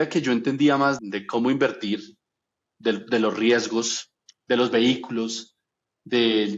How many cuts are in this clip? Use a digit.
1